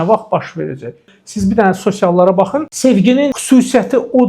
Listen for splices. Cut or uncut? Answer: cut